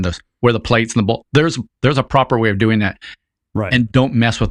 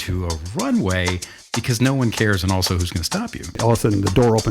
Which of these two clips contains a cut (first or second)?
second